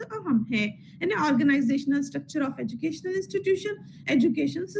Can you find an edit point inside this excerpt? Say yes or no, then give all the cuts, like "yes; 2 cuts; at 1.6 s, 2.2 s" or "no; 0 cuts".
no; 0 cuts